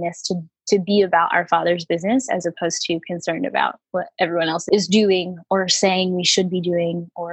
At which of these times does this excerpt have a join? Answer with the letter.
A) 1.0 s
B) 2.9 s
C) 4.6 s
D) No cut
C